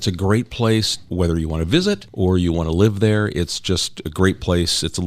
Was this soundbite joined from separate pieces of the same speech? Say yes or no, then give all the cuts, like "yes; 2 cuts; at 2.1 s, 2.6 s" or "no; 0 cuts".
yes; 2 cuts; at 1.1 s, 2.1 s